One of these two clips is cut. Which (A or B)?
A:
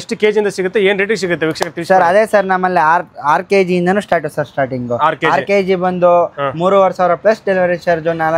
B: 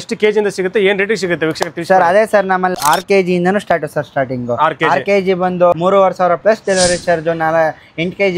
B